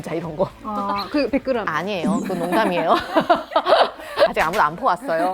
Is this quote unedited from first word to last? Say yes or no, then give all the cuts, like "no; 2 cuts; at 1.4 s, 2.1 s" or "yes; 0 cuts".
no; 1 cut; at 4.3 s